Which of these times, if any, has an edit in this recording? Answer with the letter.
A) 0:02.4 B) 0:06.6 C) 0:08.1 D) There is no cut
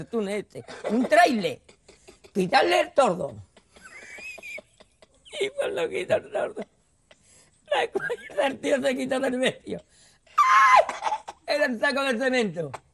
C